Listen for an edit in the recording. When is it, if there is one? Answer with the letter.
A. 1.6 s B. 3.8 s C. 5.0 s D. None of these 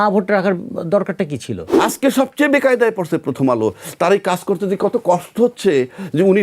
A